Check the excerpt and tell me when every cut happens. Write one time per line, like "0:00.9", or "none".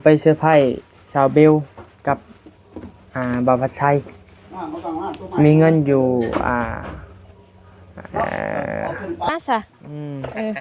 0:09.3

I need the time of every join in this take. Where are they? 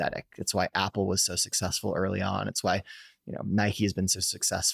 none

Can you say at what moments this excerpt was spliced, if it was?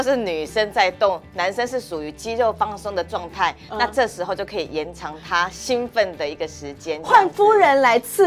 none

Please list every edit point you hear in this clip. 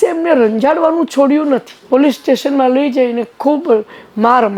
0:01.8

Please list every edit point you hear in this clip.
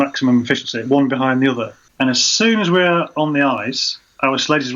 0:01.8

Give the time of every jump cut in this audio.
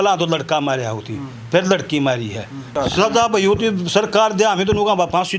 0:02.7

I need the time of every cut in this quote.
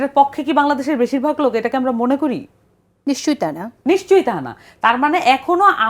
none

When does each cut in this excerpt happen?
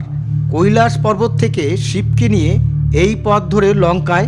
none

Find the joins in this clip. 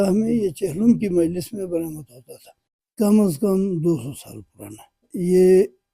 0:02.9

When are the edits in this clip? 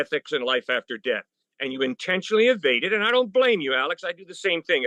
none

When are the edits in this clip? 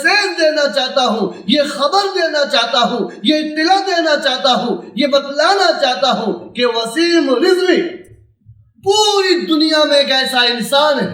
none

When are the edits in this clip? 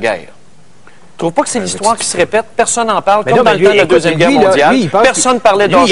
0:02.5

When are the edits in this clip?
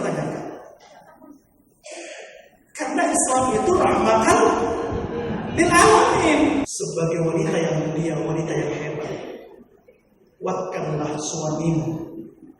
0:06.7

